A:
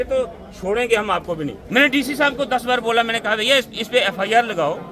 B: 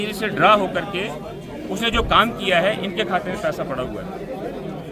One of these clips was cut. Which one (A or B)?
A